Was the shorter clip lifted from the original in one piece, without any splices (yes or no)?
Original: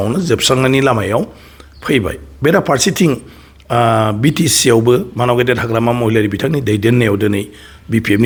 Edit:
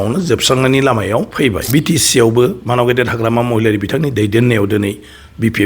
no